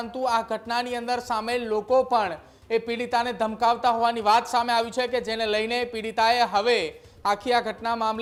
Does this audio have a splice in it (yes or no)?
no